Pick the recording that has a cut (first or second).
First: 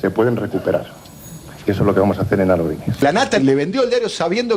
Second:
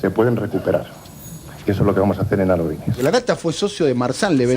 second